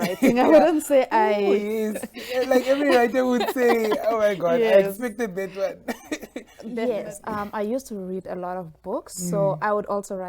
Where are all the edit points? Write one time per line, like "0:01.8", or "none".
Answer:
0:06.8